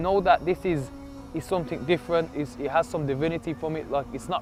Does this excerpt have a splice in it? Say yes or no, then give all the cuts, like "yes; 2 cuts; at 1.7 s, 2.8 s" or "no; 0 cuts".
no; 0 cuts